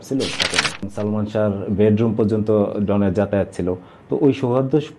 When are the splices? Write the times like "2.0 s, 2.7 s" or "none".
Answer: 0.9 s